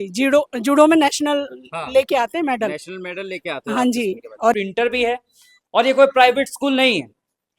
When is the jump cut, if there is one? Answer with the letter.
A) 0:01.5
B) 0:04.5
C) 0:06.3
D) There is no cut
B